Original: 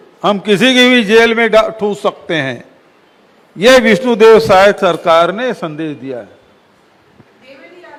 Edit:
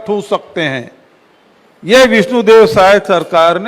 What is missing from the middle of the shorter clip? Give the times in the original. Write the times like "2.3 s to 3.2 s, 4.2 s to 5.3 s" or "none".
none